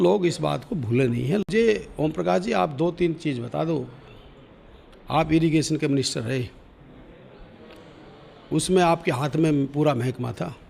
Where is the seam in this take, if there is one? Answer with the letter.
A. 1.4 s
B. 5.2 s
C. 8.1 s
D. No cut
A